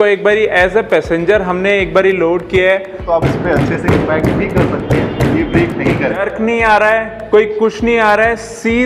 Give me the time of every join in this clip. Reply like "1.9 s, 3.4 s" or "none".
3.0 s, 6.2 s

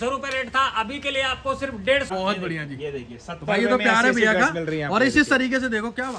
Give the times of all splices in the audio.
2.1 s

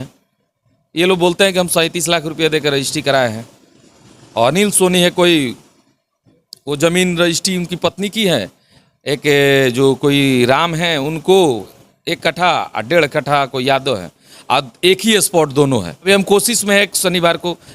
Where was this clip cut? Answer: 16.0 s

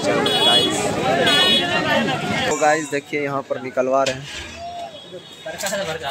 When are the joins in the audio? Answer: 2.5 s

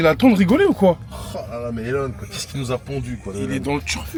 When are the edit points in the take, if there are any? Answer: none

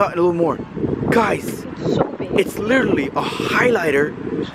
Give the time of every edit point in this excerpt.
none

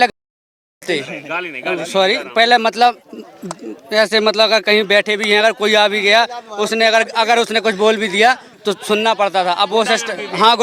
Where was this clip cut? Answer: none

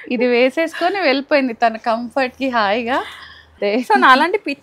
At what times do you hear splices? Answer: 3.5 s

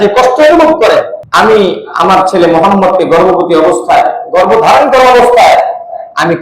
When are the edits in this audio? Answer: 1.2 s

